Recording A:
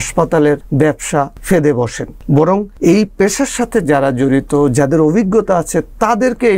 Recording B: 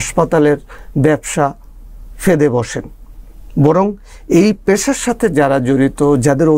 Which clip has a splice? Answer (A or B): A